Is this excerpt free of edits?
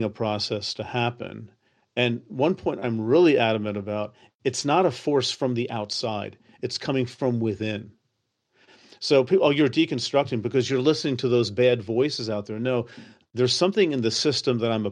yes; 0 cuts

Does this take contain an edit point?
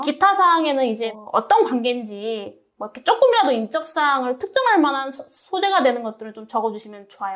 no; 0 cuts

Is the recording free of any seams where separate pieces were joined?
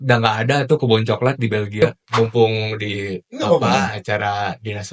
no; 1 cut; at 1.8 s

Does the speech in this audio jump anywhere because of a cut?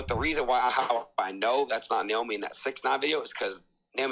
no; 0 cuts

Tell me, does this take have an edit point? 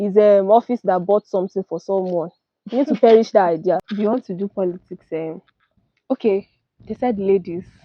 yes; 1 cut; at 3.9 s

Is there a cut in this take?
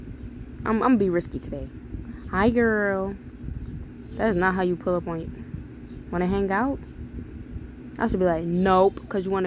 no; 0 cuts

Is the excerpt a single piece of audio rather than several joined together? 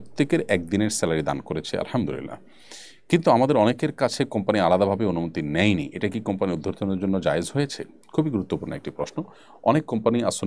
yes; 0 cuts

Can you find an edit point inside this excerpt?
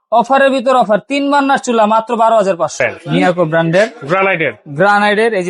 yes; 1 cut; at 2.8 s

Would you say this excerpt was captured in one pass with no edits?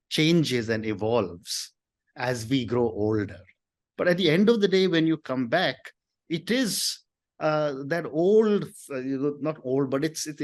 no; 1 cut; at 3.8 s

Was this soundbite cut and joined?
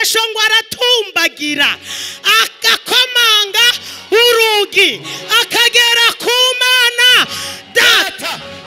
no; 0 cuts

